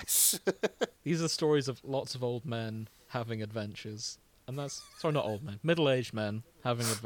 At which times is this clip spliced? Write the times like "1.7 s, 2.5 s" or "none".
0.9 s